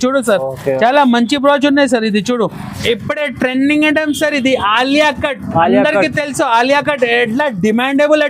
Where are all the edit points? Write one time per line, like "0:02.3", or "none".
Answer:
0:02.7